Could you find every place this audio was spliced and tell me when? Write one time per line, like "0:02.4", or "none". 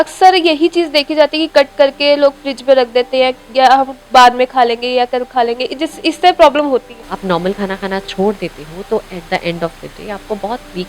0:07.0